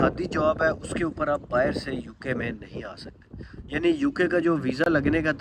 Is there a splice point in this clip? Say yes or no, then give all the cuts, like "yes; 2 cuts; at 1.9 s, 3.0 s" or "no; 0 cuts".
no; 0 cuts